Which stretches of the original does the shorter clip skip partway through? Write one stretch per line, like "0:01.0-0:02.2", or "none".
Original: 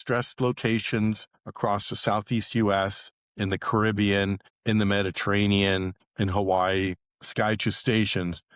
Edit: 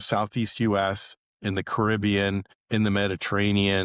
none